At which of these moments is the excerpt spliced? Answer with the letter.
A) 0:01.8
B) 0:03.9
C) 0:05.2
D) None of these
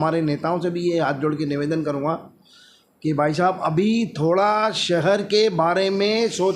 D